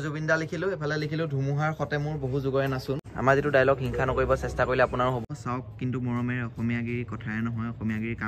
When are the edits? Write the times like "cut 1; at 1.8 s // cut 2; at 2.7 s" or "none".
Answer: cut 1; at 3.1 s // cut 2; at 5.2 s

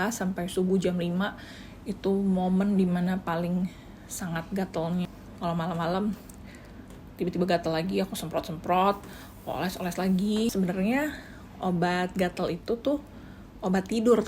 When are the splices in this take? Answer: cut 1; at 5.1 s // cut 2; at 10.5 s

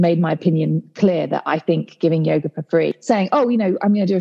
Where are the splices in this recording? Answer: cut 1; at 2.9 s

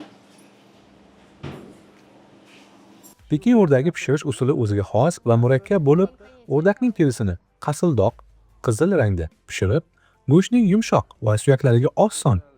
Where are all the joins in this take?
cut 1; at 3.2 s

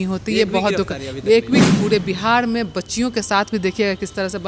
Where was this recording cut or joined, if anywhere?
cut 1; at 1.6 s

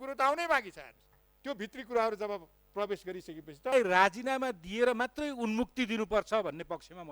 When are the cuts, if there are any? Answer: cut 1; at 3.7 s

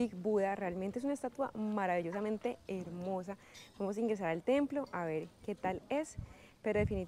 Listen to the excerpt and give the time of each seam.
none

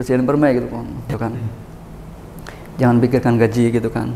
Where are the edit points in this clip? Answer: cut 1; at 1.1 s

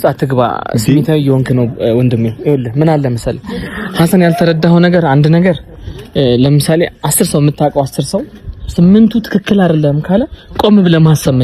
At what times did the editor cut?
none

